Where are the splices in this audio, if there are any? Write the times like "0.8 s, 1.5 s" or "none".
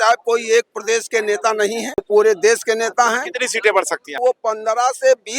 2.0 s, 4.2 s